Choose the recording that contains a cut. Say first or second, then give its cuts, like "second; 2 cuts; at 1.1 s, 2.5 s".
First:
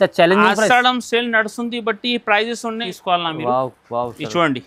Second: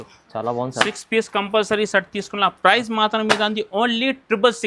first; 1 cut; at 2.9 s